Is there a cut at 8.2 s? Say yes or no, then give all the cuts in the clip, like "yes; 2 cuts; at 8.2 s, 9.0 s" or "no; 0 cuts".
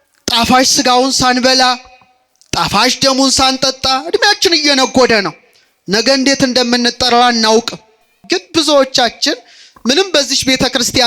yes; 1 cut; at 8.2 s